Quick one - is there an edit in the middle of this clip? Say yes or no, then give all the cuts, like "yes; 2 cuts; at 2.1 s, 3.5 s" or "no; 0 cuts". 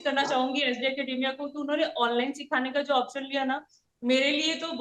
no; 0 cuts